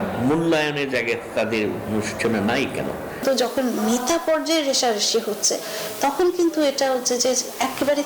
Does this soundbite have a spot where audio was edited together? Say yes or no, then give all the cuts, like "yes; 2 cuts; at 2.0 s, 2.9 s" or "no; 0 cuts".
yes; 1 cut; at 3.1 s